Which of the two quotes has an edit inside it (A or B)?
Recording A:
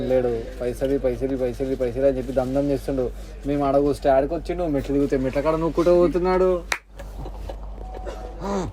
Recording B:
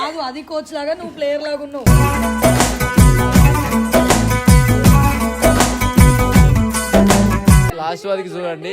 B